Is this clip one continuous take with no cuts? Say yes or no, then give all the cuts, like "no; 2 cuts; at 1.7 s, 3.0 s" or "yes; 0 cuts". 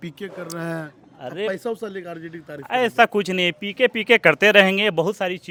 yes; 0 cuts